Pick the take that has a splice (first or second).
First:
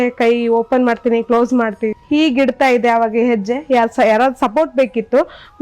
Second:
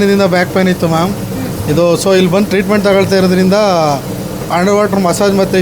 first